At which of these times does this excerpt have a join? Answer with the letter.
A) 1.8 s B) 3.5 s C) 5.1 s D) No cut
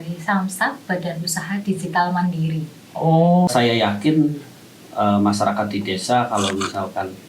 B